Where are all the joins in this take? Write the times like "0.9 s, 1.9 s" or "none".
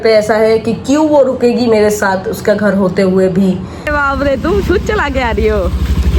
3.9 s

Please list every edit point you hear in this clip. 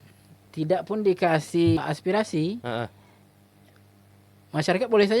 1.8 s

